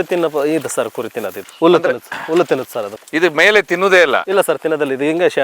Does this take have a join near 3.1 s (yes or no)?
no